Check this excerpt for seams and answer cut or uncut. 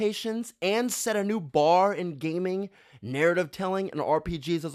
uncut